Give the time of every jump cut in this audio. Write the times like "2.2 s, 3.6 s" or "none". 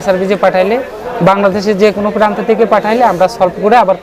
none